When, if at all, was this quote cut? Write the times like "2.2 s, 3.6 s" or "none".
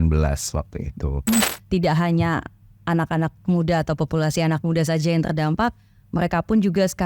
1.5 s